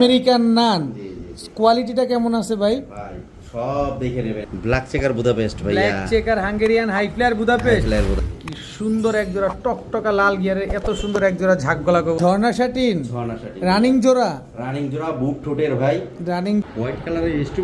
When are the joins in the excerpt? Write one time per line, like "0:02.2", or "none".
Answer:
0:04.4
0:08.2
0:12.2
0:16.6